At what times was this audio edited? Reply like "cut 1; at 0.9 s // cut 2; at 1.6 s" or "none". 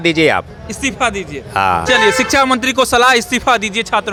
none